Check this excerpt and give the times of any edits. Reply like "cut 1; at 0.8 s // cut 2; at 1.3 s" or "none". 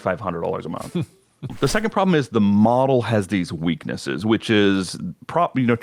cut 1; at 1.5 s